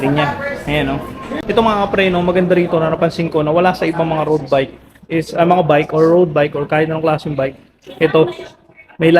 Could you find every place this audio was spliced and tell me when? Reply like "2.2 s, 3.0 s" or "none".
1.3 s